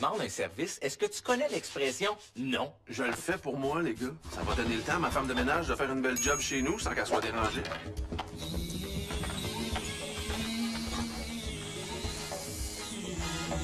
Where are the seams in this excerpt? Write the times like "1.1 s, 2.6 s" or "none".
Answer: 11.3 s